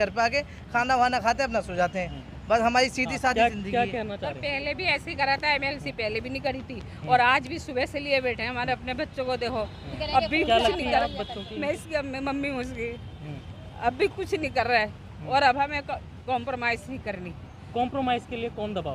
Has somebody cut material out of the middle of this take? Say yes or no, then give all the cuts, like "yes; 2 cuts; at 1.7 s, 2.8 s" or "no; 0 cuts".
no; 0 cuts